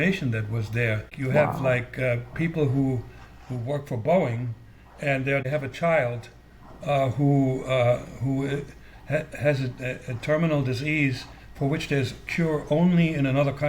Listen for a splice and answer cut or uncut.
cut